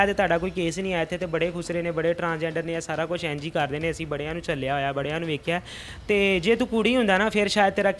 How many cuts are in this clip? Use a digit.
0